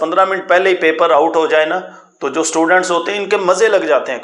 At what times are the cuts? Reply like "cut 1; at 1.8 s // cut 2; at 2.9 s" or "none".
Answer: none

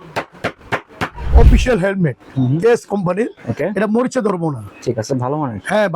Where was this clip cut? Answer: cut 1; at 1.3 s

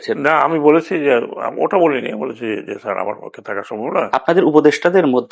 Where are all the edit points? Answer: cut 1; at 4.1 s

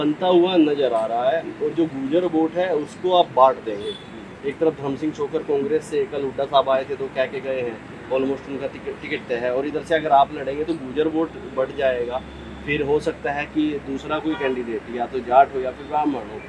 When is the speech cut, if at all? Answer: none

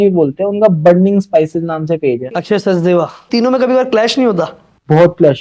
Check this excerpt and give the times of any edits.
cut 1; at 2.4 s // cut 2; at 3.3 s

